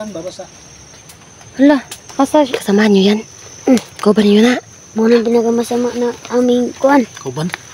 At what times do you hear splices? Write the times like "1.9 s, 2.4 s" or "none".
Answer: 2.6 s